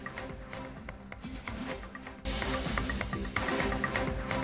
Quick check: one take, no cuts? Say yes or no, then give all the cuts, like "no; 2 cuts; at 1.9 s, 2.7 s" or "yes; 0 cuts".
no; 1 cut; at 2.2 s